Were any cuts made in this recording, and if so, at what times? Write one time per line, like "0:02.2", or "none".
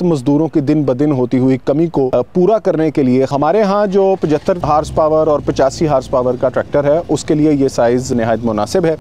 0:02.1
0:03.3
0:04.6
0:08.1